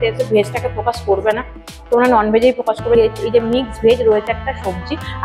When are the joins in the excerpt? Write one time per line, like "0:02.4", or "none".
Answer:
0:03.0